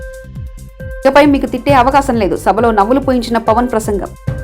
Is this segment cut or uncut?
cut